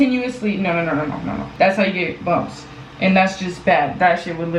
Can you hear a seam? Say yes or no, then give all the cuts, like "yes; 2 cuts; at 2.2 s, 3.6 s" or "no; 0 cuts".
yes; 1 cut; at 1.4 s